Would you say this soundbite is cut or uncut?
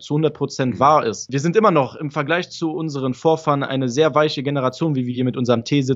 cut